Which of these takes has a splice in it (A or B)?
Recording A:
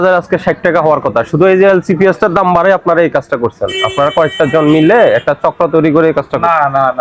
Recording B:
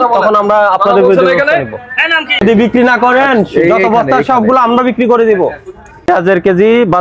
B